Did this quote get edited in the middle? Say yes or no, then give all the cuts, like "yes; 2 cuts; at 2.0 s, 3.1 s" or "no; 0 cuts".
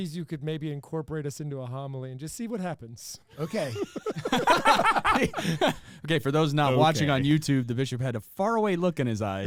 no; 0 cuts